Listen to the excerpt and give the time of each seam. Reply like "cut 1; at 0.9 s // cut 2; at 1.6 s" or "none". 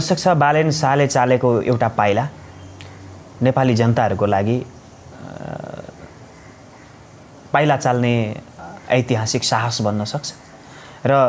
none